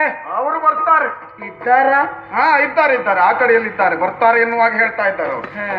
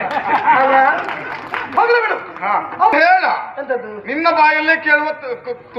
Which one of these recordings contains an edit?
second; 1 cut; at 2.9 s

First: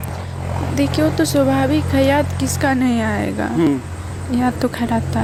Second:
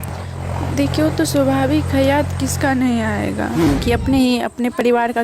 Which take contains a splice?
second; 1 cut; at 3.8 s

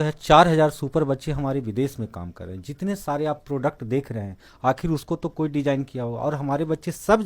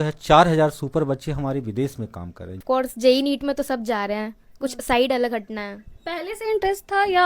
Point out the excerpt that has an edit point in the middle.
second; 1 cut; at 2.6 s

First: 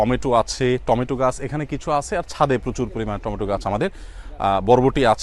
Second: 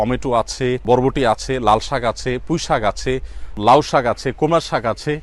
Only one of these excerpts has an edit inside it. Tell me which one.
second; 2 cuts; at 0.8 s, 3.6 s

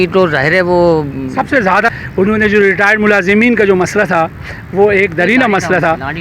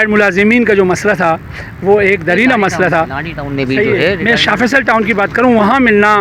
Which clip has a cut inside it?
first; 1 cut; at 1.7 s

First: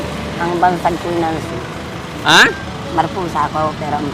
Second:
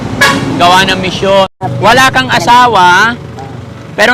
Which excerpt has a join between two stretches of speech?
second; 1 cut; at 1.6 s

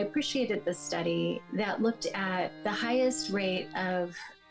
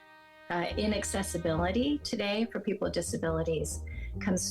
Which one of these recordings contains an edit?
first; 2 cuts; at 1.4 s, 2.6 s

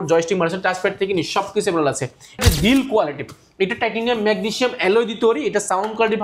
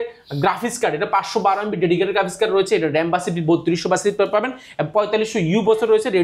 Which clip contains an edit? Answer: first; 1 cut; at 2.4 s

